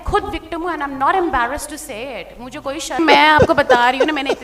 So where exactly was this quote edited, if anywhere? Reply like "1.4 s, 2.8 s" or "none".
3.0 s